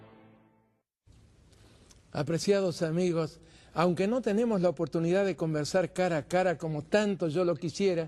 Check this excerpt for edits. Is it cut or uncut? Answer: uncut